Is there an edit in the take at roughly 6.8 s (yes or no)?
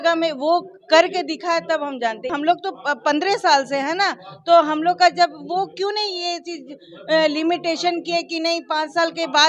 no